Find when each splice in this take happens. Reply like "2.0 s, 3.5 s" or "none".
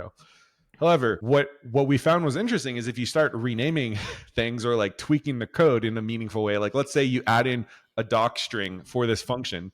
1.2 s